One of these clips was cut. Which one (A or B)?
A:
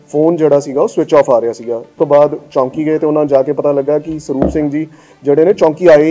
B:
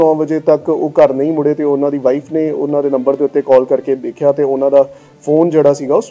A